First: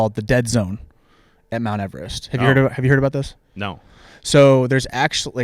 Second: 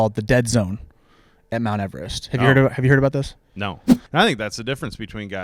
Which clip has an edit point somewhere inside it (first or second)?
second